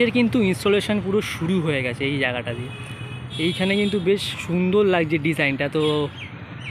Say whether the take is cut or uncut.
uncut